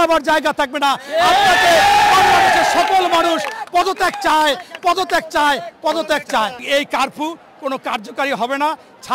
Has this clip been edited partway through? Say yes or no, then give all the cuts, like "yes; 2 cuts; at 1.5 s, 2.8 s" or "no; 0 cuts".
yes; 1 cut; at 6.6 s